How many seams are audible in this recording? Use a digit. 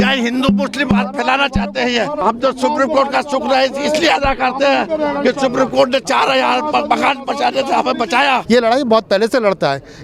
2